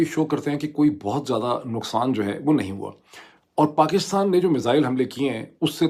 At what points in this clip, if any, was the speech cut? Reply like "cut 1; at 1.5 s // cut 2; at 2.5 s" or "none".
none